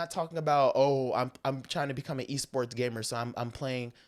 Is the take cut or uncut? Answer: uncut